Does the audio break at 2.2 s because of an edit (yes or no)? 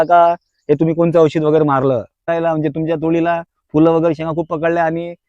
yes